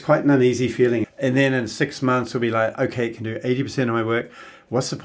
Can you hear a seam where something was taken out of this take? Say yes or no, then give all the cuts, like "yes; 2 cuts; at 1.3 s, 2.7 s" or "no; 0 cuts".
yes; 1 cut; at 1.1 s